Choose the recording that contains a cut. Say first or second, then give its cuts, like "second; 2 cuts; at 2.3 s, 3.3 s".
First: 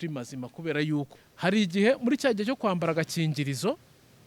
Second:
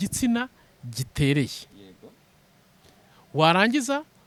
first; 1 cut; at 1.1 s